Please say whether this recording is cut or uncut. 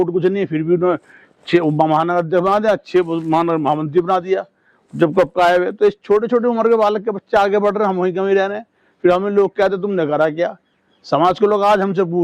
uncut